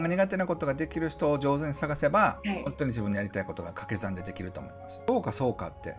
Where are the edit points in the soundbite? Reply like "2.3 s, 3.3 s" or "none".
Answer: 2.4 s, 5.1 s